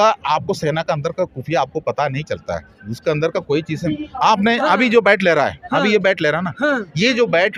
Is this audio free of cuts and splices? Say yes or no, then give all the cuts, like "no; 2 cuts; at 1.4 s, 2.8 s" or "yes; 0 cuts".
yes; 0 cuts